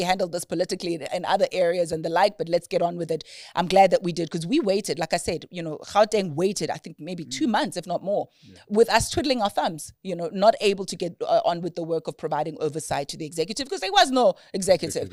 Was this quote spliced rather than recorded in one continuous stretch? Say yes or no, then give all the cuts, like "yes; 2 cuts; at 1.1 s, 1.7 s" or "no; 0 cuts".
no; 0 cuts